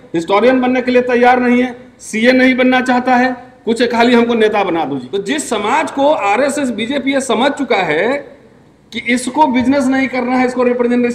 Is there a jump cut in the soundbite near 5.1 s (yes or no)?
yes